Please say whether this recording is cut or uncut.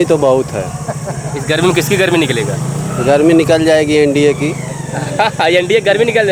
uncut